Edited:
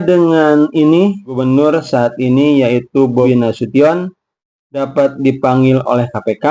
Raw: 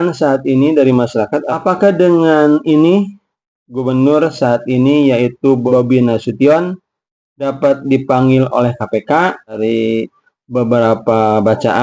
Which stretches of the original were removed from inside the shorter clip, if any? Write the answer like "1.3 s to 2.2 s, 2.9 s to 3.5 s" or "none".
3.2 s to 3.8 s, 5.7 s to 5.9 s